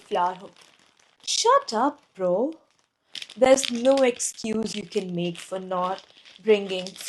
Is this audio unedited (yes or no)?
yes